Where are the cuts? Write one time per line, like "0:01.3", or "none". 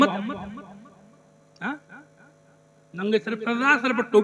none